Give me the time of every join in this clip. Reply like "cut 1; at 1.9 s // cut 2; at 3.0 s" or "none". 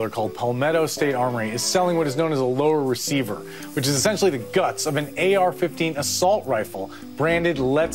none